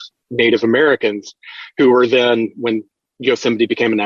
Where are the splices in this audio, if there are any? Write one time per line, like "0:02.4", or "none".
none